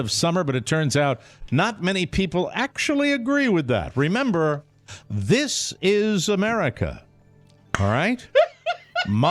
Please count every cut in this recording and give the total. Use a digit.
0